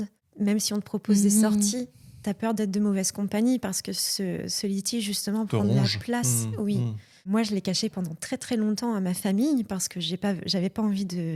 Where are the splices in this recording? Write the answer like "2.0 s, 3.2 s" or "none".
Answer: none